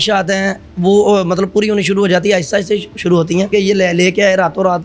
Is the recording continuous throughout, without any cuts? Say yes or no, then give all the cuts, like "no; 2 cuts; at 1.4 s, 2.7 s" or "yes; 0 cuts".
no; 1 cut; at 3.5 s